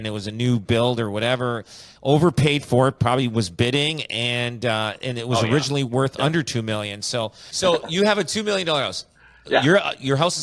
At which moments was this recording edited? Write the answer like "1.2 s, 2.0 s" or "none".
7.4 s